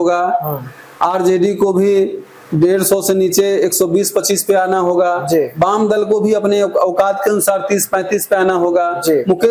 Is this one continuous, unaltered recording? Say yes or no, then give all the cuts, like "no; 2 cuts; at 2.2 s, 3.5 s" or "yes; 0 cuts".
yes; 0 cuts